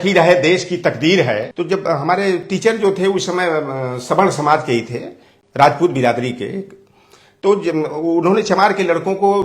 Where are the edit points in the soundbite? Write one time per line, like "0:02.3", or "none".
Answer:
0:01.5